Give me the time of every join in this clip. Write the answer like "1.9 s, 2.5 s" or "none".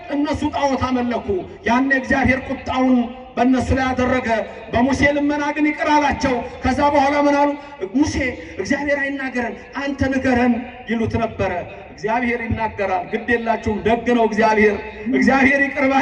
none